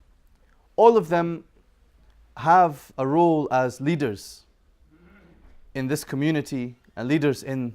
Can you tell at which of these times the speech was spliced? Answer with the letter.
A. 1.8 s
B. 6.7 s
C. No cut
A